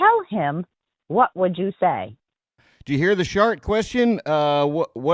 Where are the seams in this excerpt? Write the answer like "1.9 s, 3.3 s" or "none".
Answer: 2.7 s

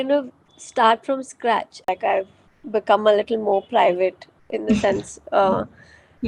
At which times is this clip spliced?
1.9 s

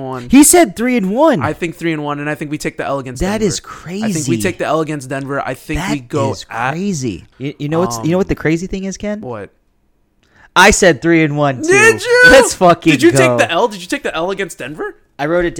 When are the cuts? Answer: 7.2 s

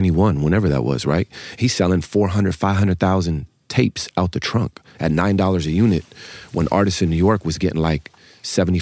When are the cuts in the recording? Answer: none

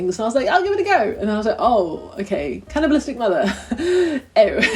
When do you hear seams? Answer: none

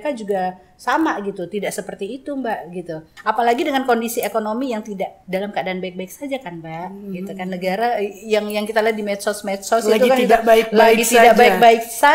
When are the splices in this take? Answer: 3.1 s, 5.2 s

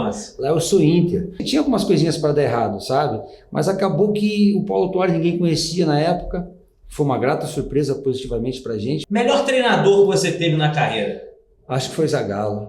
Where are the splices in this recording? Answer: 1.5 s, 9.0 s

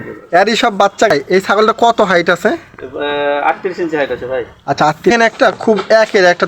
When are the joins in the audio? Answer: 1.1 s, 5.1 s

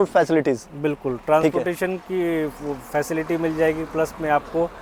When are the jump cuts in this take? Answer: none

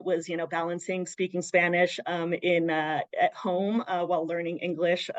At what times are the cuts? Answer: none

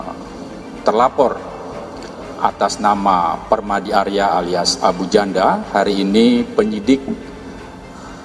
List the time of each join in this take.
none

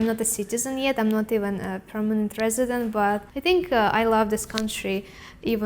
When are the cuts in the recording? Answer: 3.3 s

